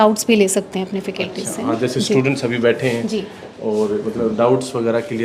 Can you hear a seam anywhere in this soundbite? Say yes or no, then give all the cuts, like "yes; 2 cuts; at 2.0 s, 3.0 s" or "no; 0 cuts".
no; 0 cuts